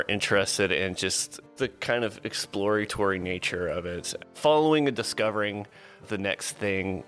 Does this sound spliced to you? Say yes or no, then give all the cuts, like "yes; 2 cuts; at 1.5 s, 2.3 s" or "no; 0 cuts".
yes; 2 cuts; at 1.4 s, 4.3 s